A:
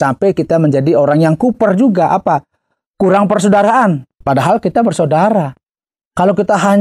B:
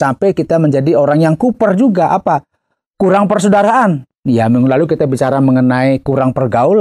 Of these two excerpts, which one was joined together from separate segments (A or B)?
A